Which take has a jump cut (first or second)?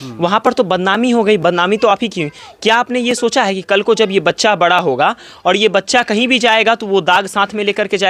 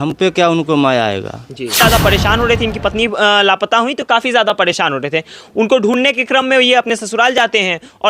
second